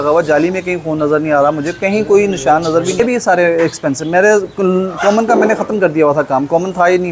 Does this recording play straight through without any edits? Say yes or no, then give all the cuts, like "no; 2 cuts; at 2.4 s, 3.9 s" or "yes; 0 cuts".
no; 1 cut; at 3.0 s